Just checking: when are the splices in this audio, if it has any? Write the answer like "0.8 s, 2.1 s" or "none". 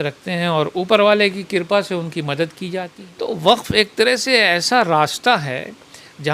3.0 s